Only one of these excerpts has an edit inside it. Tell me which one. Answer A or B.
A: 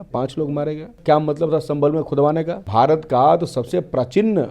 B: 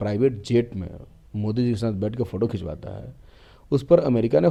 A